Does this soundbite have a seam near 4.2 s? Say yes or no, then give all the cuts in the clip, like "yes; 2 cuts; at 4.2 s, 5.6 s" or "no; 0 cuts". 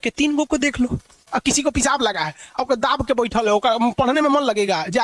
no; 1 cut; at 1.2 s